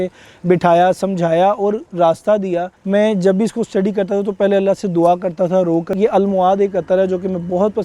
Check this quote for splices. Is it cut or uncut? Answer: cut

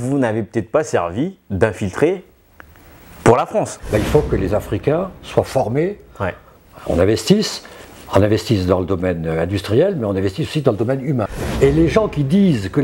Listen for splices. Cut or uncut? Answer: cut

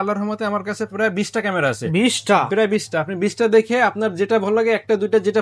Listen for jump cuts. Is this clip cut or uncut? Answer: uncut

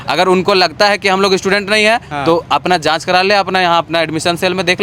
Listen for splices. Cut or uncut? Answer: uncut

